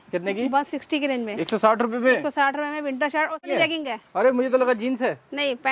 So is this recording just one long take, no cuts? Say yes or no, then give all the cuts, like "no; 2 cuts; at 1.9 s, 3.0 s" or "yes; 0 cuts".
no; 1 cut; at 3.5 s